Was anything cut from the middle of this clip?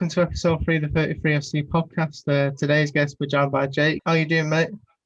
yes; 1 cut; at 4.0 s

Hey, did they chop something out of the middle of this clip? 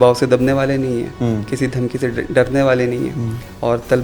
no; 0 cuts

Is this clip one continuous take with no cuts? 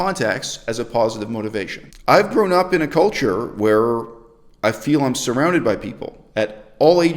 no; 1 cut; at 1.8 s

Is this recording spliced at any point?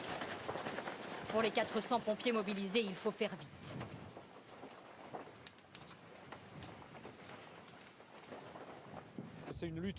yes; 1 cut; at 3.2 s

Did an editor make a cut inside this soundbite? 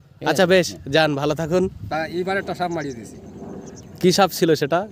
yes; 1 cut; at 1.8 s

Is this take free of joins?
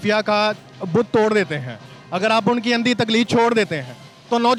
yes; 0 cuts

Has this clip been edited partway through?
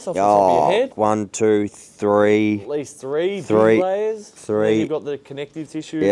yes; 1 cut; at 0.9 s

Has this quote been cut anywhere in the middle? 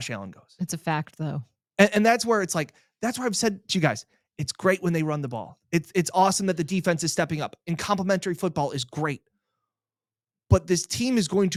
no; 0 cuts

